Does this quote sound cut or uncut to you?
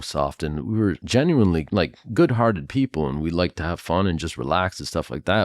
cut